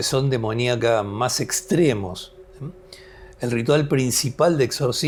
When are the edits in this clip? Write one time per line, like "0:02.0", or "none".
none

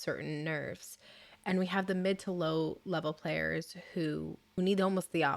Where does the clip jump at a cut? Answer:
0:04.4

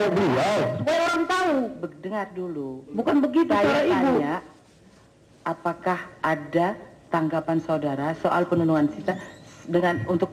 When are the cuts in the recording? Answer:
0:05.8

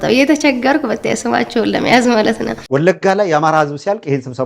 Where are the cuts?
0:02.6

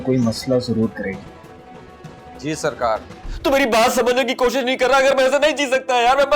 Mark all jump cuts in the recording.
0:03.2

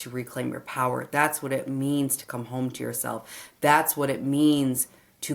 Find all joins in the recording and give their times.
none

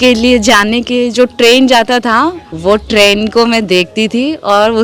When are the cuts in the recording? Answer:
0:02.5

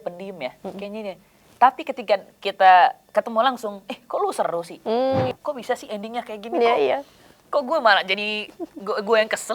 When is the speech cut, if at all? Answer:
0:05.3

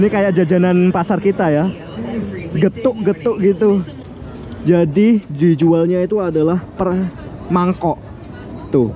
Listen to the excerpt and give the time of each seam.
0:03.9

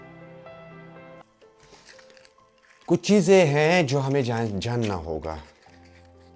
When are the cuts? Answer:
0:01.2

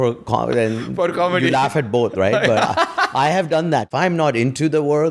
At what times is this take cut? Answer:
0:03.9

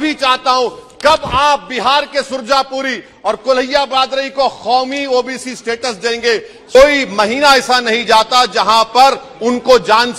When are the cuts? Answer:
0:06.7

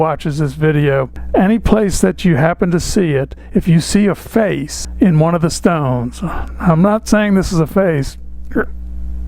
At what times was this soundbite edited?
none

